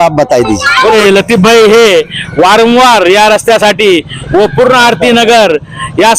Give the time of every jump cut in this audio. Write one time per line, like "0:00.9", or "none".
0:00.9